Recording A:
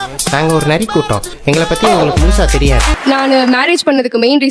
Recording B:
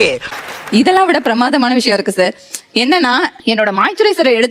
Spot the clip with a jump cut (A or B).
A